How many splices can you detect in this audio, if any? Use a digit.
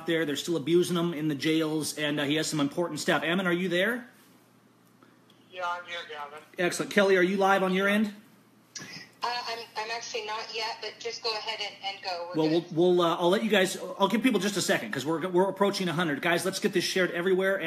1